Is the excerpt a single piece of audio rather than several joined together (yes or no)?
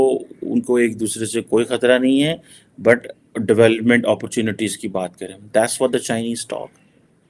yes